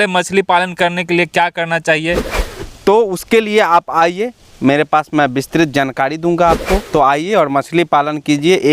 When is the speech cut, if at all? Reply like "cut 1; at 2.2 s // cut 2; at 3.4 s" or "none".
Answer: cut 1; at 2.3 s // cut 2; at 6.8 s